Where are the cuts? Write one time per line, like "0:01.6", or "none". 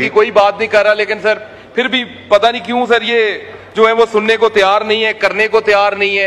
none